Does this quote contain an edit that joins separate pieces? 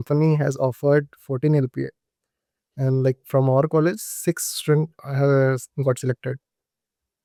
no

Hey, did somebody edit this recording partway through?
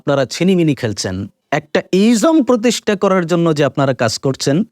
yes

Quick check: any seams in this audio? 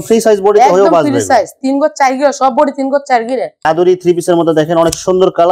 yes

